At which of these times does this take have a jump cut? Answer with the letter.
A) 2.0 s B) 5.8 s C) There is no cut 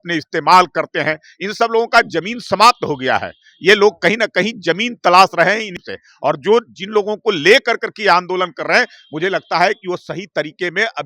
B